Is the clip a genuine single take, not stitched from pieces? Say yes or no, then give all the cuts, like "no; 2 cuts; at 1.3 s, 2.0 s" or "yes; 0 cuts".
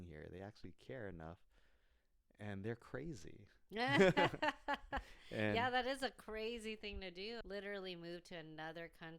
no; 1 cut; at 7.4 s